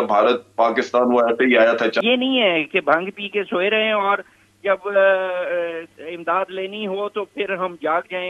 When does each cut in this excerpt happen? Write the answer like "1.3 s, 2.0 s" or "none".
2.0 s